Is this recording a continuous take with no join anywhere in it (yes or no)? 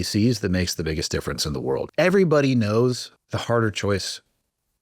no